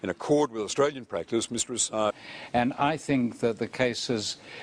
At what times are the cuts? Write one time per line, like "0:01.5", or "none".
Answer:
none